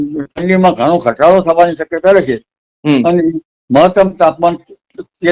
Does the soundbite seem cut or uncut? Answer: uncut